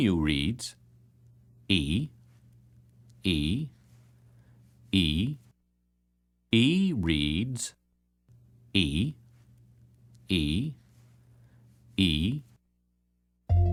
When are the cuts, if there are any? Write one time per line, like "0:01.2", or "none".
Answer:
none